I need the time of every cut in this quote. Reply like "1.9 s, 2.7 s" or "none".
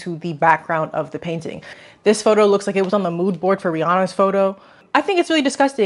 1.8 s